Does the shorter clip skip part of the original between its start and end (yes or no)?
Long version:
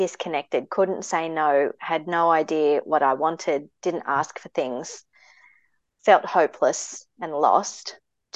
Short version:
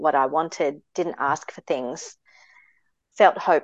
no